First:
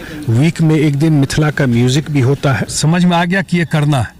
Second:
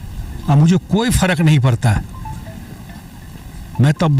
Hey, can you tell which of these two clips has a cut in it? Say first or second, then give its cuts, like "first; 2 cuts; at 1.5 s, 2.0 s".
first; 1 cut; at 2.7 s